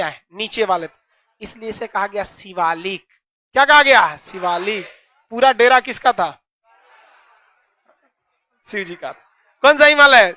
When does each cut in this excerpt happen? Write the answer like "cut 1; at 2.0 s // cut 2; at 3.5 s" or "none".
none

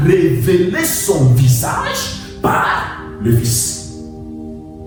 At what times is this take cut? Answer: none

